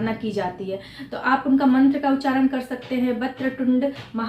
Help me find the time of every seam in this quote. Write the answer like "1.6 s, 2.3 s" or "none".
none

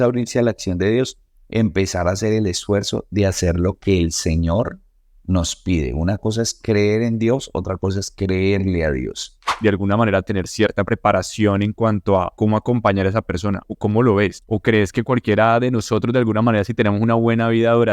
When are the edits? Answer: 9.5 s, 12.3 s, 13.7 s, 14.4 s

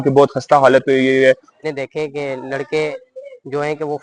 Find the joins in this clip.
1.5 s

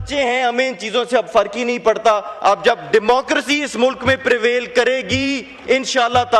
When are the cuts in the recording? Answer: none

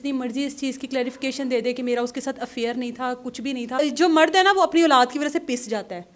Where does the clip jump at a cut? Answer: 3.8 s

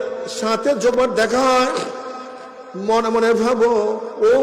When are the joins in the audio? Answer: 0.9 s

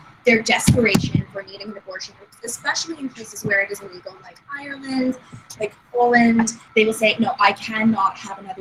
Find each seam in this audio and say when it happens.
6.7 s

